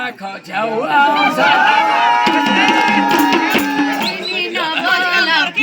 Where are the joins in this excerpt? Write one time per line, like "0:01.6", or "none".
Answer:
0:04.1